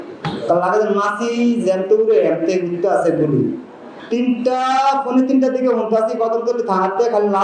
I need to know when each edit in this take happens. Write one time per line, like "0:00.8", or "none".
none